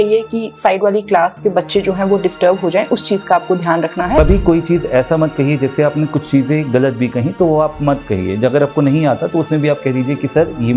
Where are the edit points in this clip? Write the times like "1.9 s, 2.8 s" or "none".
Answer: 4.2 s